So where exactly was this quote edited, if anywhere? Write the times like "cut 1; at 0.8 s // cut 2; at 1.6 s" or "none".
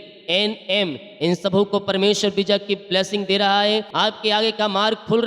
cut 1; at 3.9 s